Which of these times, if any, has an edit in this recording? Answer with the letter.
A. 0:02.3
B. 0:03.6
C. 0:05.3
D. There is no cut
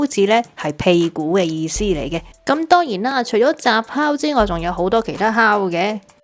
A